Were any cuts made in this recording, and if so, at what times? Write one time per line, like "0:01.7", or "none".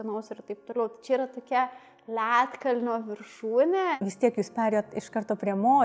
0:03.9

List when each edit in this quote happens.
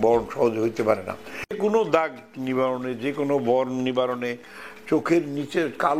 0:01.6

